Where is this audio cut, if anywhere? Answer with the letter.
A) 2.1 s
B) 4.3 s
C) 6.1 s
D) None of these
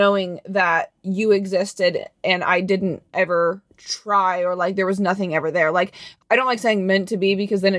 C